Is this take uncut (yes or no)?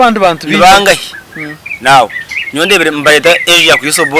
yes